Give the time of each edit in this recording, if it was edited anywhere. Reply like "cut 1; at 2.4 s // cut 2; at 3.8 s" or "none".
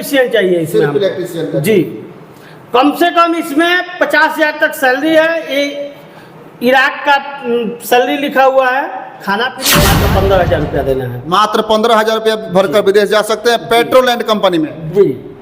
cut 1; at 9.6 s